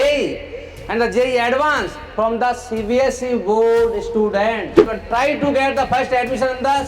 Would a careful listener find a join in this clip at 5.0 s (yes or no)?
yes